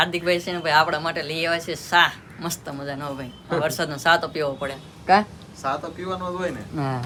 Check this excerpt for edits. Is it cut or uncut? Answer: uncut